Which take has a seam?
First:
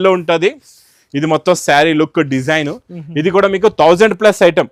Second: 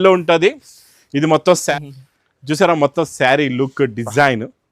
second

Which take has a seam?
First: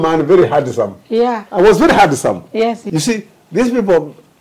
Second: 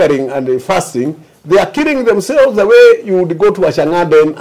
first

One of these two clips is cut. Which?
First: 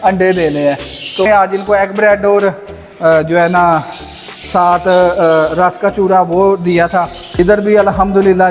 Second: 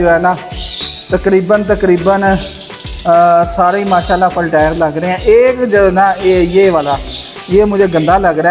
first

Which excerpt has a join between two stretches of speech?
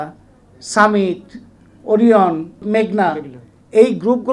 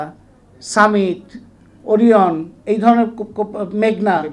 first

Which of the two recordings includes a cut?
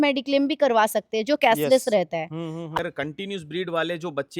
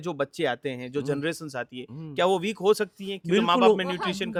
first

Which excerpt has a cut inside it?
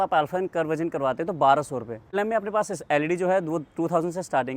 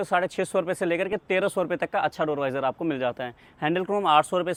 first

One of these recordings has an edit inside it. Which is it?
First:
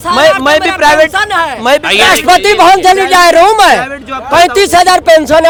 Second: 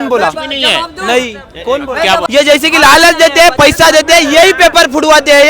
second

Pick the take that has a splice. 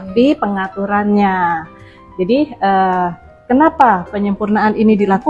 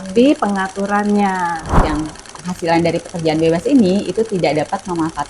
second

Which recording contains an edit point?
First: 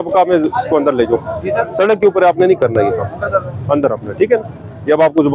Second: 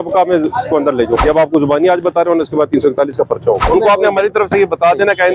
second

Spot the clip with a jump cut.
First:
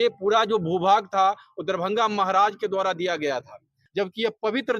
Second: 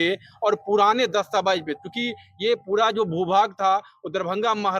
first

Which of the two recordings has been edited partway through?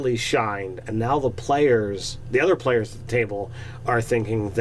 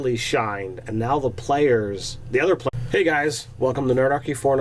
first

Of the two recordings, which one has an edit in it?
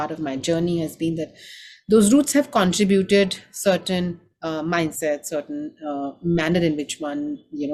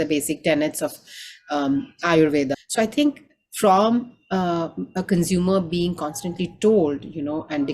second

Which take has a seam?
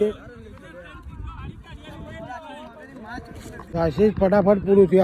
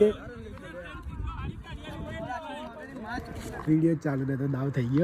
second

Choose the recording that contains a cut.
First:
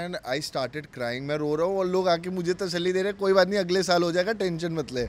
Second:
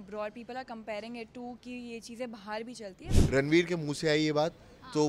second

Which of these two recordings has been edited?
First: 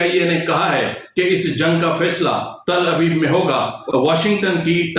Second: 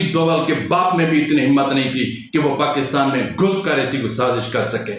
first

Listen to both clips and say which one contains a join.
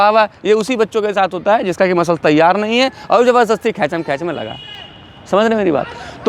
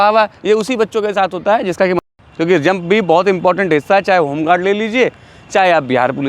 second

